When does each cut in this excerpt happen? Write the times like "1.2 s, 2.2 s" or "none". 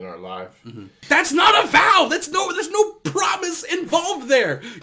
1.0 s